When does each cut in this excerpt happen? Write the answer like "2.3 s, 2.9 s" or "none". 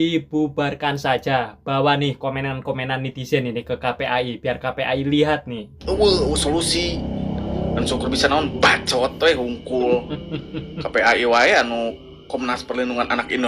5.7 s